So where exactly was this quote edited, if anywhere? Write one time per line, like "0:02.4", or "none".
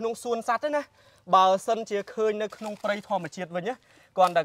none

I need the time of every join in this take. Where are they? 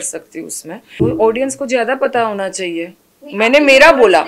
0:01.0

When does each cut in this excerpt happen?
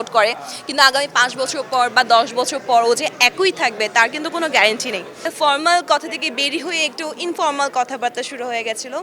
0:05.3

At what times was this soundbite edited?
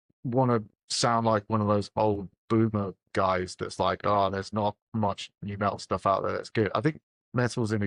none

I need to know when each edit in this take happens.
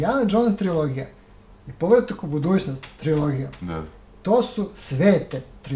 none

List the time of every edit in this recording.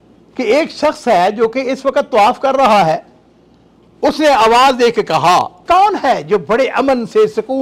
0:05.6

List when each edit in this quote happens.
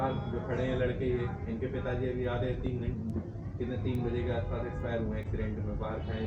none

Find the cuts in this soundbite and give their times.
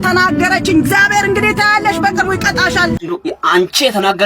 0:03.0

